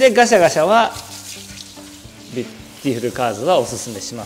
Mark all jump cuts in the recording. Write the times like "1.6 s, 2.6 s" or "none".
none

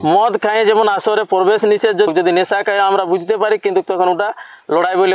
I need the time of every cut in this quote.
2.1 s

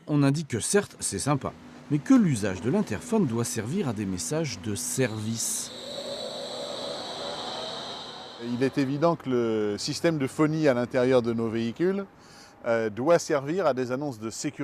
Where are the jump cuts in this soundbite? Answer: none

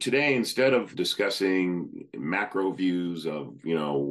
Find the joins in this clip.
0.9 s

